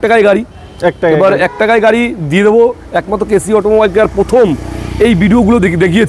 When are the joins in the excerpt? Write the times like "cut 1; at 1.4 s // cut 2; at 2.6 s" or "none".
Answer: none